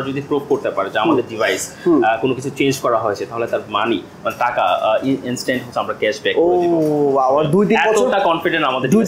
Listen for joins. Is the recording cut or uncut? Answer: uncut